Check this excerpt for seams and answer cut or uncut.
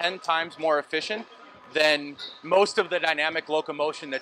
uncut